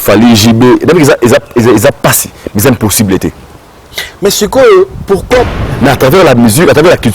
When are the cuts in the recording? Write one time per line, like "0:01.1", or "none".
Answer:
0:05.6